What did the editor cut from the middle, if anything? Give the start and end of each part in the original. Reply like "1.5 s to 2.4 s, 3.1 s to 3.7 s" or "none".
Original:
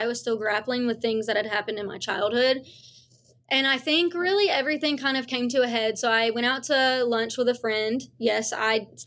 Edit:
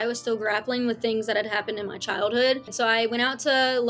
2.7 s to 6.0 s